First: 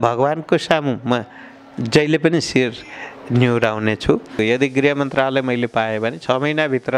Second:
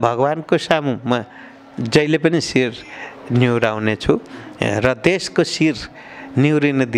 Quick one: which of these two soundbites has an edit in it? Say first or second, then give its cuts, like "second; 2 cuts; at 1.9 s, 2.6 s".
first; 1 cut; at 4.4 s